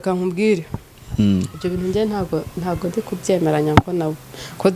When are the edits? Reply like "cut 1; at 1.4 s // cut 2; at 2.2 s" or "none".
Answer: none

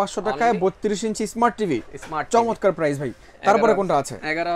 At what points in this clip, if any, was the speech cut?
none

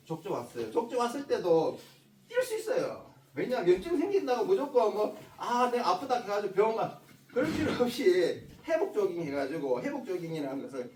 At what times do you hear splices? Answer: none

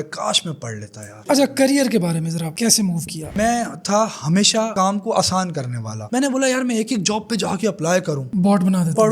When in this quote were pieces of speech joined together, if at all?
cut 1; at 1.1 s // cut 2; at 3.4 s

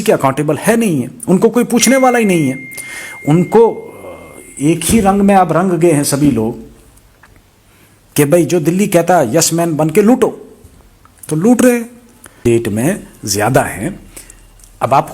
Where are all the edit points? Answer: cut 1; at 12.4 s

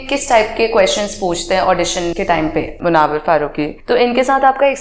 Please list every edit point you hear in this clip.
cut 1; at 2.6 s // cut 2; at 3.8 s

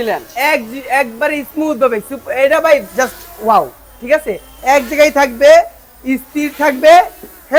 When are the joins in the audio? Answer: none

